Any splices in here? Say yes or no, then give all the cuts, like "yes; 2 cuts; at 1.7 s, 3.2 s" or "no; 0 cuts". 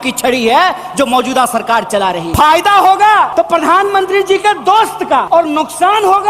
yes; 3 cuts; at 2.3 s, 3.3 s, 5.3 s